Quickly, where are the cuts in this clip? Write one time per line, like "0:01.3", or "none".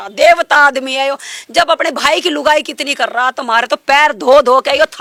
none

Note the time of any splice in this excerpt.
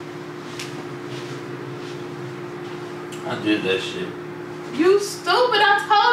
none

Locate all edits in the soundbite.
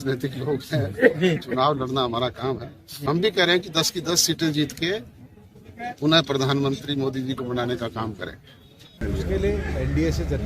0:09.0

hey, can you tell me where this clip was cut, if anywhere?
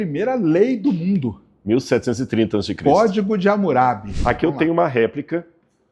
0:04.1

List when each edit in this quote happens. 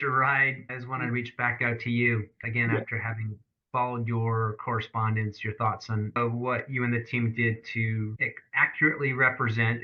0:06.2

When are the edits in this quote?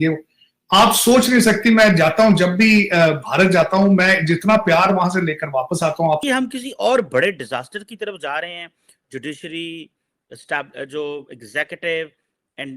0:06.2

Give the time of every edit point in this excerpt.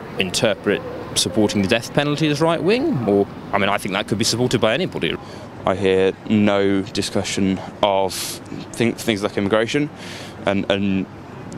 0:05.1

